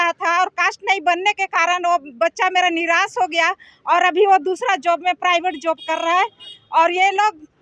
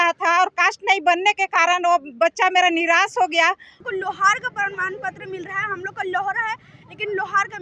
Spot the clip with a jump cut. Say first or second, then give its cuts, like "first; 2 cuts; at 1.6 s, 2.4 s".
second; 1 cut; at 3.7 s